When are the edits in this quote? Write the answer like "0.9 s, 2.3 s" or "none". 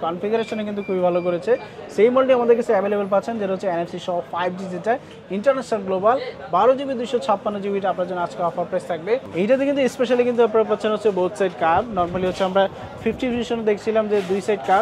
9.3 s